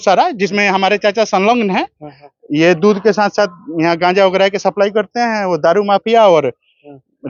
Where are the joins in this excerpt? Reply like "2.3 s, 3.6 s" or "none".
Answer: none